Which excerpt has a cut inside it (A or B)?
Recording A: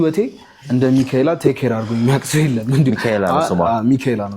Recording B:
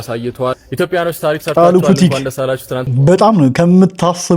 B